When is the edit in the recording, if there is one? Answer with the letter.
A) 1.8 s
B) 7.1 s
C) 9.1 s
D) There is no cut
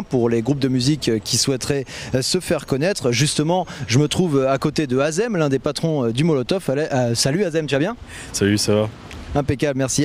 C